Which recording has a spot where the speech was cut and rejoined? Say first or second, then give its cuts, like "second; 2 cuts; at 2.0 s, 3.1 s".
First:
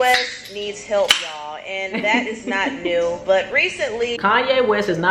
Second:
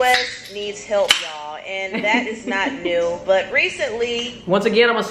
first; 1 cut; at 4.2 s